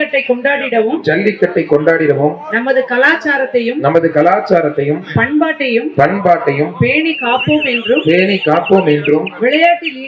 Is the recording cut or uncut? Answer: uncut